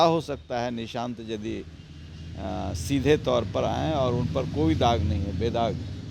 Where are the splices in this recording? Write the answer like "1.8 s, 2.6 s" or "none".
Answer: none